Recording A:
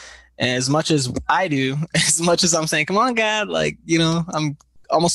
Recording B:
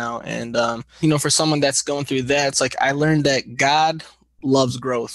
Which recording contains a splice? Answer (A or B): B